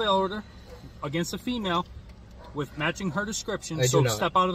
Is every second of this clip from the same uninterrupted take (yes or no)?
yes